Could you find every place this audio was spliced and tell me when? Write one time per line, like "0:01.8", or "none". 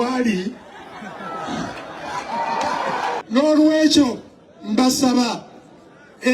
0:03.2